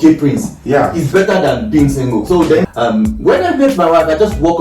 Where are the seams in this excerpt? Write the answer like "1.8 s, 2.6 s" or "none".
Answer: 2.6 s